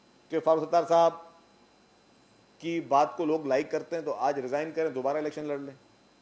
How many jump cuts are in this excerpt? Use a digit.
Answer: 0